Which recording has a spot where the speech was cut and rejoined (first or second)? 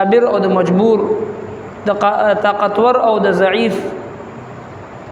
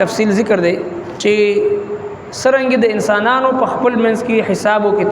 second